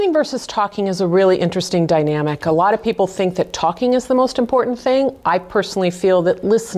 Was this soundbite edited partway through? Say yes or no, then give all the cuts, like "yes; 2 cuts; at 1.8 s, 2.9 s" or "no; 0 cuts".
no; 0 cuts